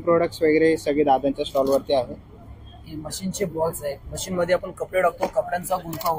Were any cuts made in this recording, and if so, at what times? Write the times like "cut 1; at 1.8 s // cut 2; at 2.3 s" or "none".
none